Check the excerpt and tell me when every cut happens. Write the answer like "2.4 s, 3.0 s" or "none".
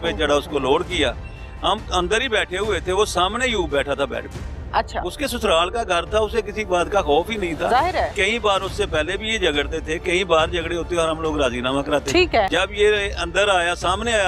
12.5 s